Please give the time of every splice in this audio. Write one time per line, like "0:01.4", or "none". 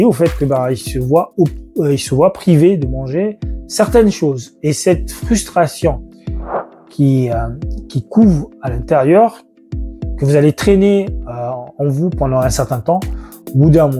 none